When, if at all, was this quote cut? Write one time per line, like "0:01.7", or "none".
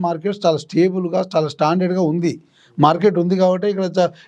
none